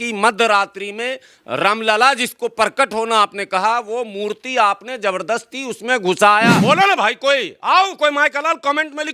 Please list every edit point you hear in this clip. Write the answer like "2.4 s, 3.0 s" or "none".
6.6 s